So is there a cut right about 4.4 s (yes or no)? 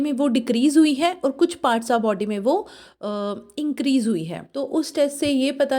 yes